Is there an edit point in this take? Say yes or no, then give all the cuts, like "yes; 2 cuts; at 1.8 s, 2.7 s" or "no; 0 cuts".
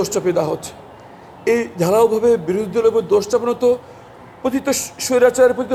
no; 0 cuts